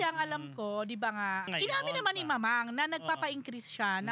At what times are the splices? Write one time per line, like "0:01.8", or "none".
0:01.5